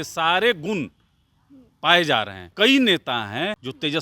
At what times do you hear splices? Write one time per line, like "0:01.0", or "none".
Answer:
0:02.5